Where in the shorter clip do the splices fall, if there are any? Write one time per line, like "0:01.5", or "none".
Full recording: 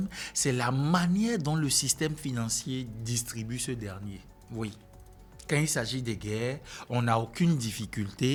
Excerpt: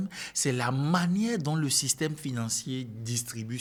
none